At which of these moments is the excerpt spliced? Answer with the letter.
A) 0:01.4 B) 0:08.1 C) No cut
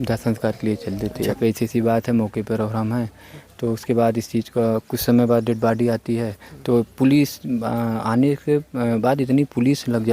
A